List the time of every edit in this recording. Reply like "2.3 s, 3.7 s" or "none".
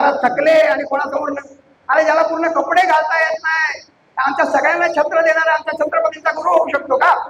none